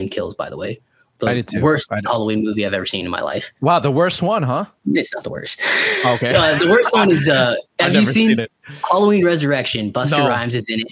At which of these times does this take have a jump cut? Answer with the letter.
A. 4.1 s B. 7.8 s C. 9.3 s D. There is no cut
D